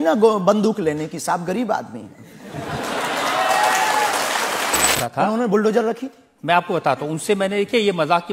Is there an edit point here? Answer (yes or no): yes